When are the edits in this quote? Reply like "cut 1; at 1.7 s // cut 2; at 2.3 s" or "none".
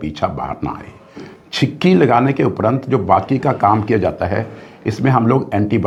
none